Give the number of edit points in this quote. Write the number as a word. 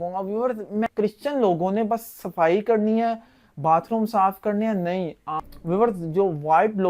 two